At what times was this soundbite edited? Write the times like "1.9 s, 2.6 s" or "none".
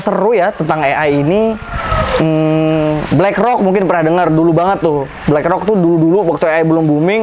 none